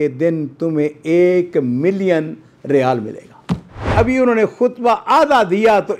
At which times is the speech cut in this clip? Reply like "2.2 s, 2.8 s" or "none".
3.9 s